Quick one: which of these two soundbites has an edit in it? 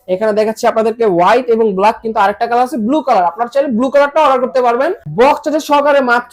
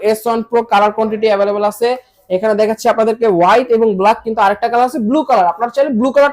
first; 1 cut; at 5.1 s

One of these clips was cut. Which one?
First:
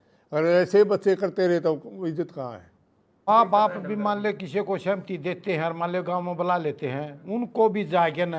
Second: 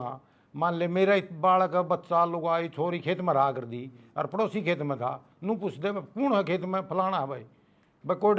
first; 1 cut; at 3.3 s

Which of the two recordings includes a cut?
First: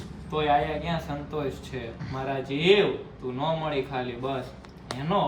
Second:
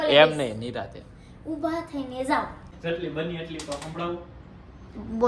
second; 1 cut; at 2.7 s

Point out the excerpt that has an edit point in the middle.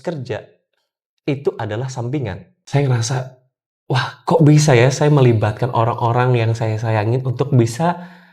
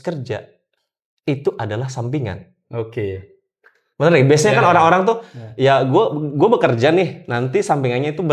first; 1 cut; at 2.5 s

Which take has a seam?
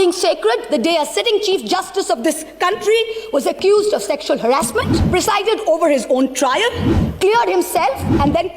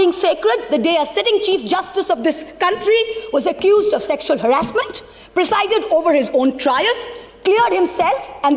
first; 1 cut; at 5.0 s

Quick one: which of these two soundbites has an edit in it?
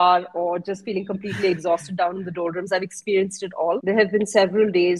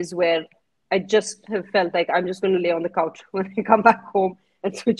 first; 1 cut; at 3.8 s

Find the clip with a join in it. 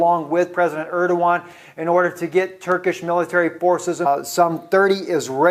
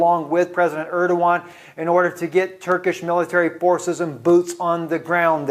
second; 1 cut; at 4.0 s

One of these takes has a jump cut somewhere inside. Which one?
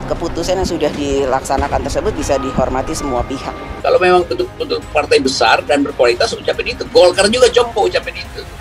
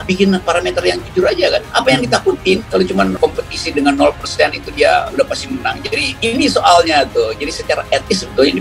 first; 1 cut; at 3.7 s

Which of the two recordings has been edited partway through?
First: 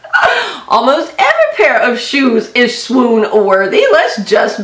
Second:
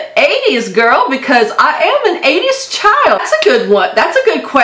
second; 1 cut; at 3.2 s

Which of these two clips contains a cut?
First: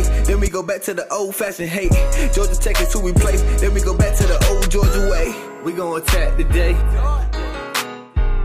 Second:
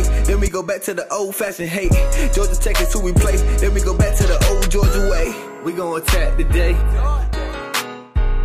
second; 1 cut; at 7.3 s

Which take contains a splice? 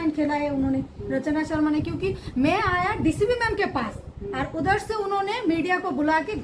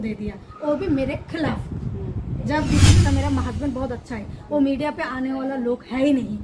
second; 1 cut; at 3.0 s

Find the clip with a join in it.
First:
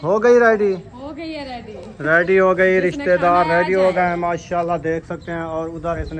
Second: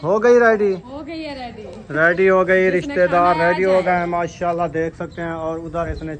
second; 1 cut; at 0.9 s

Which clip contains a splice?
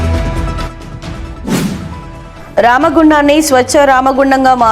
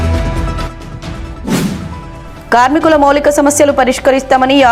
first; 1 cut; at 1.8 s

